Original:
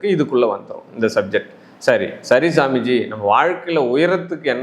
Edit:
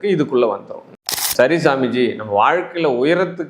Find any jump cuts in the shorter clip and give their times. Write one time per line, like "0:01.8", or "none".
0:01.1